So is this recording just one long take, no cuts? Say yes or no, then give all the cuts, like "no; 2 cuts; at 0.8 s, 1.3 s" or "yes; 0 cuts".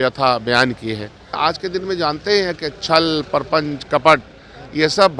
no; 1 cut; at 1.3 s